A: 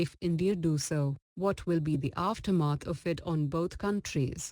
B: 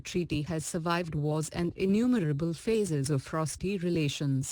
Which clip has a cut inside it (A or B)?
A